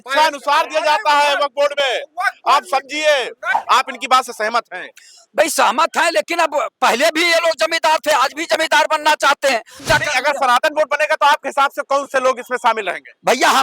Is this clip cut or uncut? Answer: cut